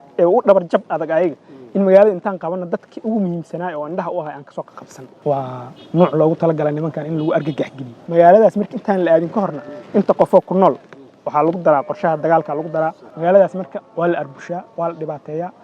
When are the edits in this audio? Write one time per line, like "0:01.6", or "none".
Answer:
0:05.2
0:07.9
0:13.1